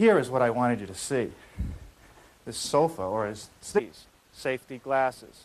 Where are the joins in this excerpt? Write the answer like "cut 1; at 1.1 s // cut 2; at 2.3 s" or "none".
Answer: none